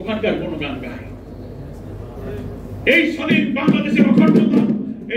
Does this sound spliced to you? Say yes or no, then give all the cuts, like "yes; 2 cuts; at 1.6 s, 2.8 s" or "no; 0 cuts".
no; 0 cuts